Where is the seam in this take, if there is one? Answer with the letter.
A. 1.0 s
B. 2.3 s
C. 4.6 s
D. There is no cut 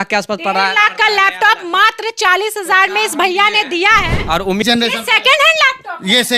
C